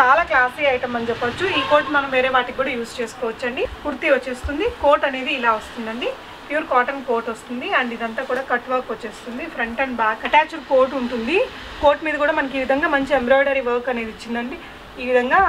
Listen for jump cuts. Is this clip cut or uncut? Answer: cut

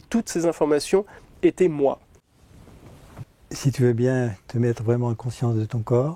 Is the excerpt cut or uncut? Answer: cut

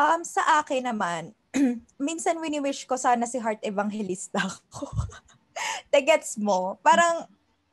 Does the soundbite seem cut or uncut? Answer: cut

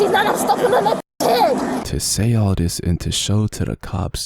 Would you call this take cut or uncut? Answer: cut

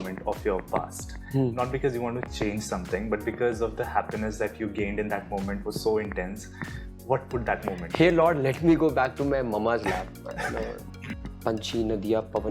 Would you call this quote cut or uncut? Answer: cut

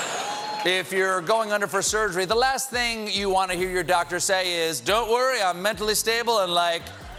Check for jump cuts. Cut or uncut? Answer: uncut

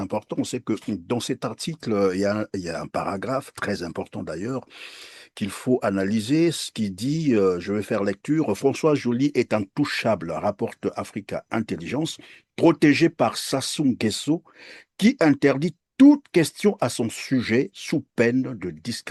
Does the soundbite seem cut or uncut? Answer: uncut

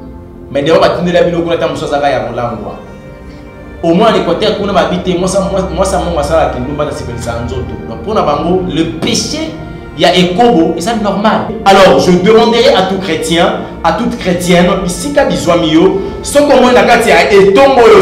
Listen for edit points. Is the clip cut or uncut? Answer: cut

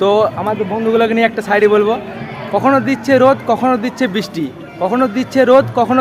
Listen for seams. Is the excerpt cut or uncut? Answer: uncut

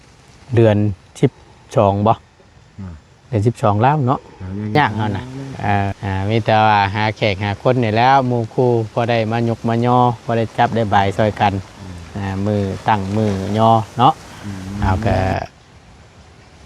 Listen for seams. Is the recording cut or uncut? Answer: cut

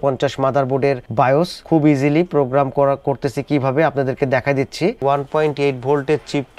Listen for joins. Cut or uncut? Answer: cut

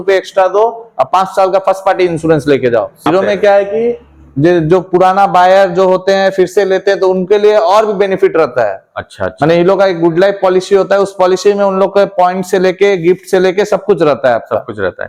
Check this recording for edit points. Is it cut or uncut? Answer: uncut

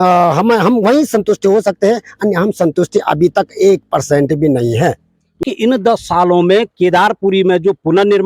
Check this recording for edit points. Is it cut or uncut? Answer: cut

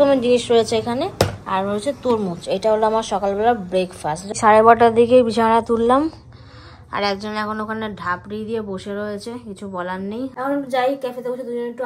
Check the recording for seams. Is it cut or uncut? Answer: cut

